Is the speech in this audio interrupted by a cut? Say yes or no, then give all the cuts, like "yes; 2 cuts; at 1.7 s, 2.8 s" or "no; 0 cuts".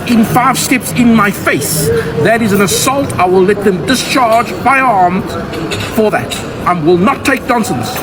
no; 0 cuts